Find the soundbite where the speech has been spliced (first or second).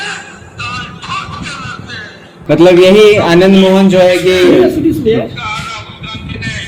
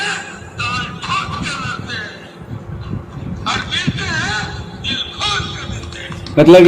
first